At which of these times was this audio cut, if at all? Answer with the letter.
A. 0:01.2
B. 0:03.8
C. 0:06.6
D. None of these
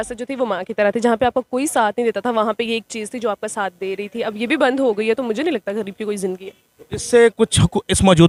D